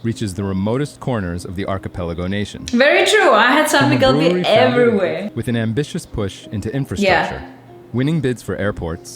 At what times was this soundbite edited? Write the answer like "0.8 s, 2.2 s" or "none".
5.2 s